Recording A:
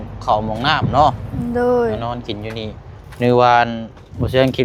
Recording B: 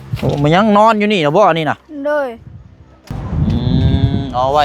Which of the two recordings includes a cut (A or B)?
B